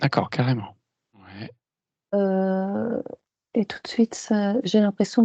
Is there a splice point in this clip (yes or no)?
yes